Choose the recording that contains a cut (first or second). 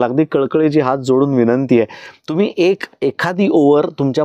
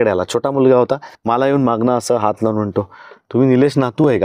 second